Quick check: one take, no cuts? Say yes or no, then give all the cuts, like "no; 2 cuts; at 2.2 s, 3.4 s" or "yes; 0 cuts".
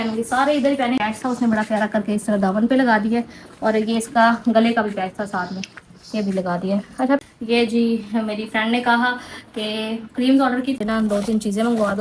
no; 3 cuts; at 1.0 s, 7.2 s, 10.8 s